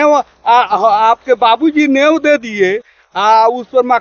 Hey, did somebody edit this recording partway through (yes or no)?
no